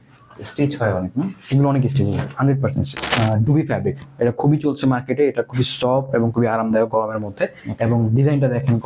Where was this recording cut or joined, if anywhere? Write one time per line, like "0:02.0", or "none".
0:03.0
0:07.6